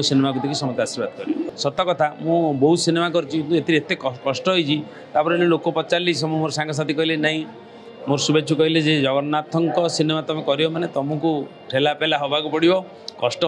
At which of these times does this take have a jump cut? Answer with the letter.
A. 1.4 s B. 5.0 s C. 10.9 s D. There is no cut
A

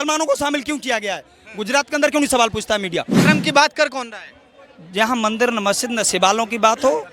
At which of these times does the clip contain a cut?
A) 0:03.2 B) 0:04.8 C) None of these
A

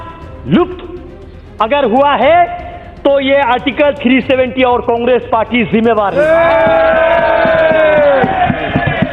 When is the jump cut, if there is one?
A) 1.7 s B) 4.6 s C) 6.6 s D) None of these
D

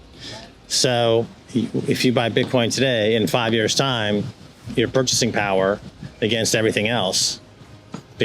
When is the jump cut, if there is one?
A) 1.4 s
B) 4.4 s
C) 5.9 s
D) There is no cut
A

